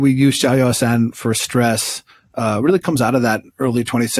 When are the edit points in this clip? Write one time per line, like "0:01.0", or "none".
none